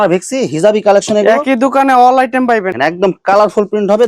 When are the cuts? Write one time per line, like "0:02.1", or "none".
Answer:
0:02.7